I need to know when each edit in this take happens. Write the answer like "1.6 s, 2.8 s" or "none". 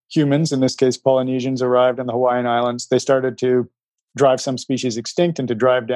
none